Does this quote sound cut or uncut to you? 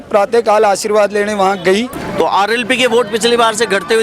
cut